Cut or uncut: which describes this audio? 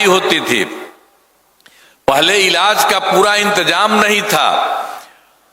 uncut